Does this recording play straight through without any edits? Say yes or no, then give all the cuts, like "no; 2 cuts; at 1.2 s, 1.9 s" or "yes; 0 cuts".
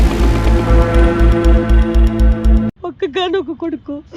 no; 1 cut; at 2.7 s